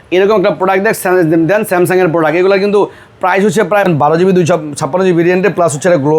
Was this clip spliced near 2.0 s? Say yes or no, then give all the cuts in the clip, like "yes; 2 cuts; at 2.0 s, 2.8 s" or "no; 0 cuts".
no; 1 cut; at 3.9 s